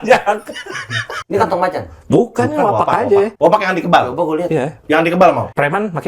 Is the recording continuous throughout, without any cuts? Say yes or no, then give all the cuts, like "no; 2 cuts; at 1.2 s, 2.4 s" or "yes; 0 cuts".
no; 2 cuts; at 1.1 s, 3.3 s